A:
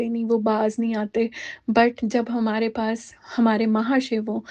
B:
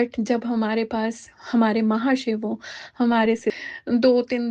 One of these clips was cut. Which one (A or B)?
B